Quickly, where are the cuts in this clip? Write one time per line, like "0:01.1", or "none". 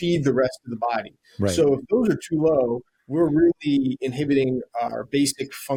none

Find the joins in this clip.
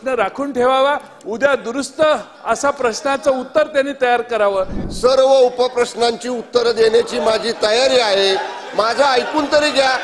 0:04.8

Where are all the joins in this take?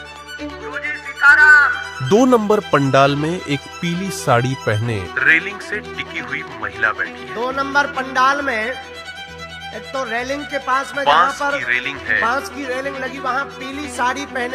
none

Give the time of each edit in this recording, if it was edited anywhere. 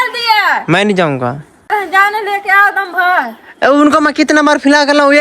0:01.7

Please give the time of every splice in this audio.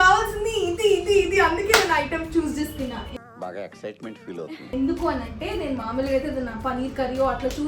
none

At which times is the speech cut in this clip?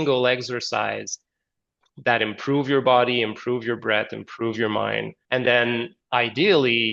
0:05.1

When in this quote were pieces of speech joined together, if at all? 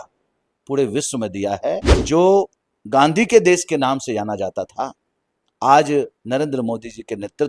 0:01.9

